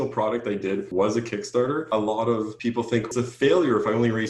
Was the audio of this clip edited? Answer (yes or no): yes